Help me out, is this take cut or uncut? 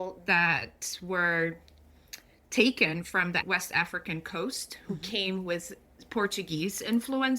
cut